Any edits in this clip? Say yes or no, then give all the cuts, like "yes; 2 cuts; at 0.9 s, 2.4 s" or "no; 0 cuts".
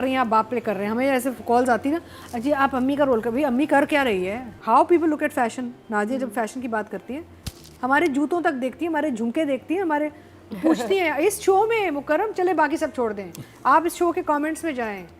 yes; 1 cut; at 4.5 s